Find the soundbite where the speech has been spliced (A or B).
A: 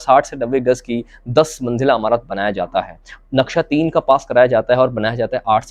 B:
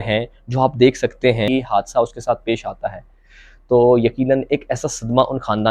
B